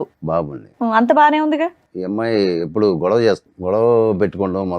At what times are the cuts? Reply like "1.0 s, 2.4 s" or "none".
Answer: 1.9 s, 3.5 s

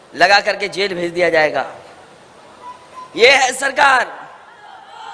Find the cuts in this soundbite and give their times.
none

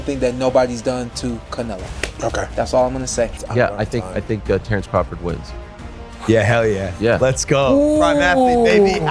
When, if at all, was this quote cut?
3.4 s

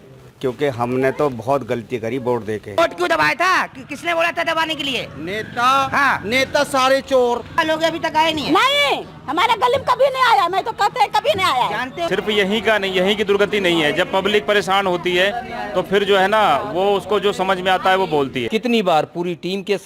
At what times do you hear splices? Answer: 2.8 s, 7.6 s, 12.1 s, 18.4 s

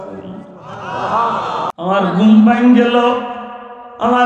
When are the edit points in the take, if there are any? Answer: 1.7 s

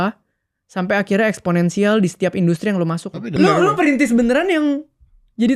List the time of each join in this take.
3.4 s

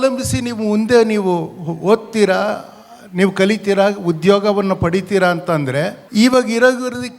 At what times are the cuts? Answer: 6.0 s

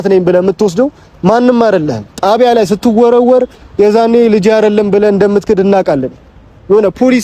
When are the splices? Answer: 2.0 s

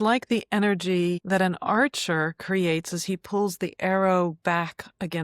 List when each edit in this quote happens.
1.2 s

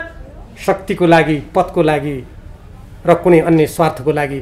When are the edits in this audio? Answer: none

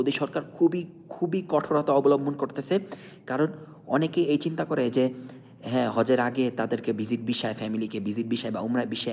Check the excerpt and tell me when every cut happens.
none

